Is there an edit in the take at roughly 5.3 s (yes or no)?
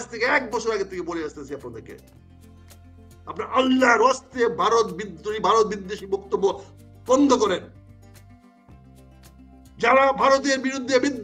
no